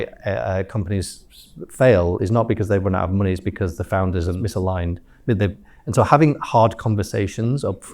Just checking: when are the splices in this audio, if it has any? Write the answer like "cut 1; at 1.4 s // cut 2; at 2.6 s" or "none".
cut 1; at 4.4 s

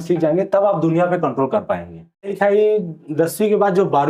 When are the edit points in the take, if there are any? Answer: cut 1; at 2.3 s

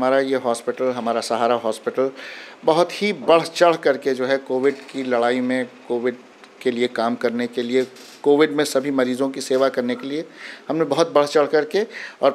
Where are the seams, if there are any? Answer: none

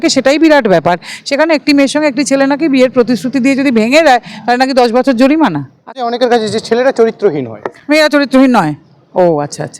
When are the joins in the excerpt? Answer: cut 1; at 6.0 s

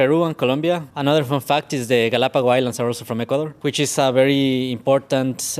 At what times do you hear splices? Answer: cut 1; at 0.9 s // cut 2; at 3.5 s

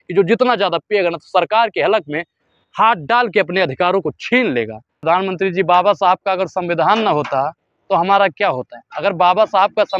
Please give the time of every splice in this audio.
cut 1; at 4.8 s

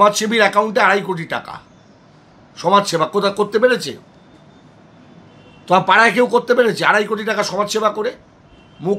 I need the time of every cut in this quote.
none

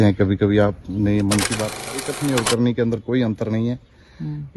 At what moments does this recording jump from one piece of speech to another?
cut 1; at 2.1 s

